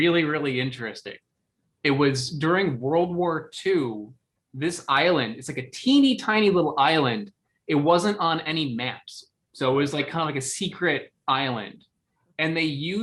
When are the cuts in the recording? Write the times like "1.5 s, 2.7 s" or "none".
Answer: 1.7 s